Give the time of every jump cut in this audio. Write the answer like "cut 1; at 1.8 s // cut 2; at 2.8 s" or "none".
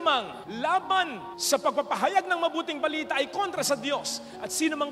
none